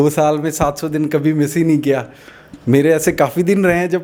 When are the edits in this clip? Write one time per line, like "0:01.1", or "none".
none